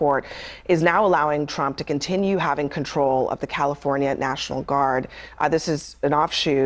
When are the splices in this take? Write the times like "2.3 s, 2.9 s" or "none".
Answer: none